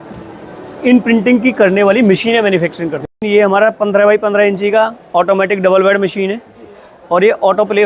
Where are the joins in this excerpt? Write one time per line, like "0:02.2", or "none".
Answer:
0:03.1